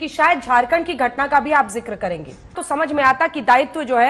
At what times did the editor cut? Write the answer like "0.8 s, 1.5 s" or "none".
2.6 s